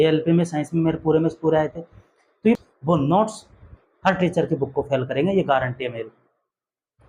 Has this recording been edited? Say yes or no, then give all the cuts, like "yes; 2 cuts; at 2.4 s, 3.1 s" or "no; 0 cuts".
yes; 1 cut; at 2.6 s